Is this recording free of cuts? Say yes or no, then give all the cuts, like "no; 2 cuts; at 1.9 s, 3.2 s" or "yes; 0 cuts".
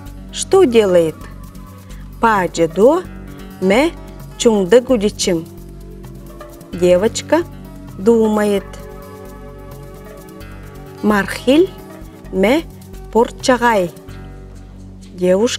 no; 2 cuts; at 9.0 s, 11.0 s